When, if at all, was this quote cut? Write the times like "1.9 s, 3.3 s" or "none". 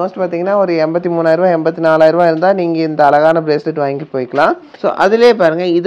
4.7 s